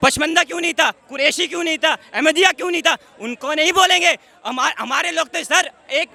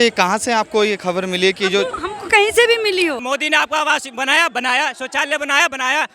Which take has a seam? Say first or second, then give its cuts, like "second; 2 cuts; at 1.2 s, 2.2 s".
second; 1 cut; at 3.2 s